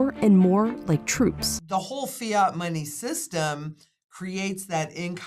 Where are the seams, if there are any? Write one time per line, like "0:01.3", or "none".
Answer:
0:01.5